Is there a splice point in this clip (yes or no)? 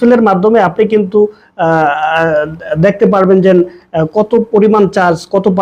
no